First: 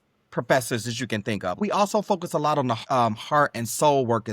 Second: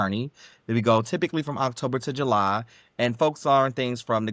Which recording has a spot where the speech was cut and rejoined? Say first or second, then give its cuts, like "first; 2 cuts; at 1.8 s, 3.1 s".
first; 2 cuts; at 1.6 s, 2.8 s